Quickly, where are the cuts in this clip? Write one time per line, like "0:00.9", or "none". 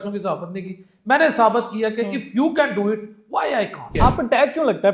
0:03.9